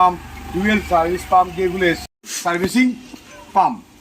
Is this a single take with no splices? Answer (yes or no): no